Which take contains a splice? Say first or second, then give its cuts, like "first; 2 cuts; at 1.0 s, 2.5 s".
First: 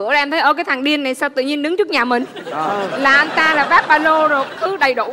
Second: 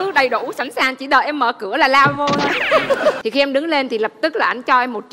second; 1 cut; at 3.2 s